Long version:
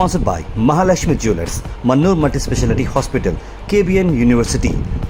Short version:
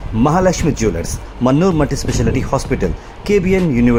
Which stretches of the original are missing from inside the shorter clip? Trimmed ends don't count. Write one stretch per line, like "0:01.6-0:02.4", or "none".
none